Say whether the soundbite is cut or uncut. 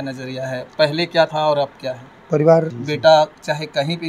cut